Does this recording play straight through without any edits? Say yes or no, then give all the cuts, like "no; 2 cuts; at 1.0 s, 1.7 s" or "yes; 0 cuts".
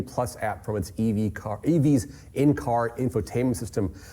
yes; 0 cuts